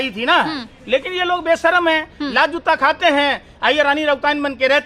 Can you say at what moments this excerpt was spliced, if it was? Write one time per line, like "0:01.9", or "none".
none